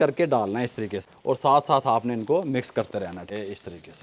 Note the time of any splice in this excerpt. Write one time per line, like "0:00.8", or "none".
0:01.1
0:03.3